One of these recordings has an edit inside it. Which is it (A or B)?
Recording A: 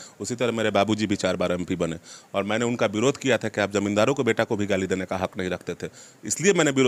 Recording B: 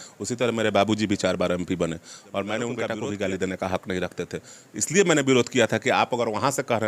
B